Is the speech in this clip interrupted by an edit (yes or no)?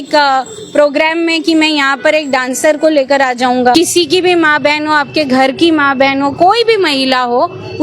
yes